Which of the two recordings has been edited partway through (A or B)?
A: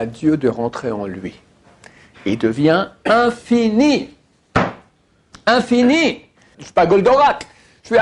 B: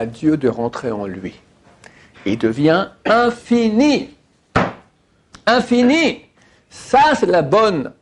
A